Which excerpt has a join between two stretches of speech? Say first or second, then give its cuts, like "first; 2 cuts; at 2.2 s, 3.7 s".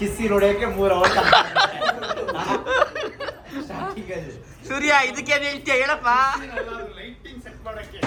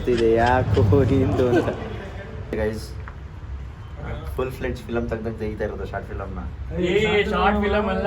second; 1 cut; at 2.4 s